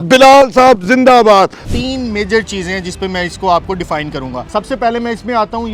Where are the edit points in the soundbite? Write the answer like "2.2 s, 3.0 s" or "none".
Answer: 1.6 s